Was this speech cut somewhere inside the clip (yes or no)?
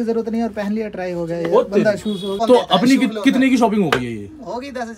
yes